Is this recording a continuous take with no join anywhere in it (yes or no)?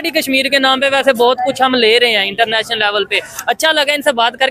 yes